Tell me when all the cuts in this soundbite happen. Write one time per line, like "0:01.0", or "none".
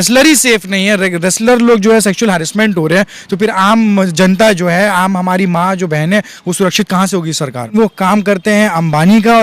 0:07.7